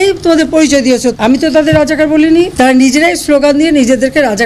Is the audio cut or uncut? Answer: cut